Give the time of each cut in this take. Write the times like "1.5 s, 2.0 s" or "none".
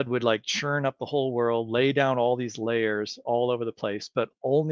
none